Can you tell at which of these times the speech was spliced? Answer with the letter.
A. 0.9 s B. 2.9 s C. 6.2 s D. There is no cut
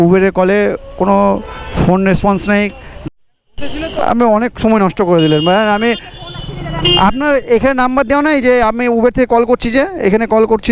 B